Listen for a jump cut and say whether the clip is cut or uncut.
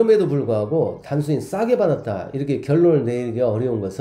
uncut